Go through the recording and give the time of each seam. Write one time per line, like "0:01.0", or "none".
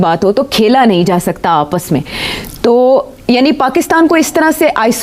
none